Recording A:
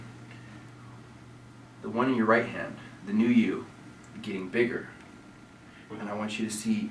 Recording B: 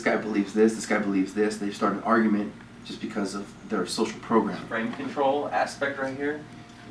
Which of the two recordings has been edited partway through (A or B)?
B